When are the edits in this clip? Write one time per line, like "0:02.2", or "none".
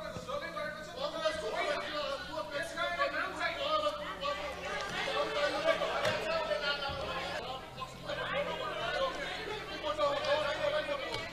0:07.4